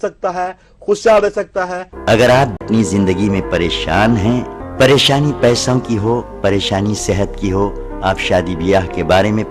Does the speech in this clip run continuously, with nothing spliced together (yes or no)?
no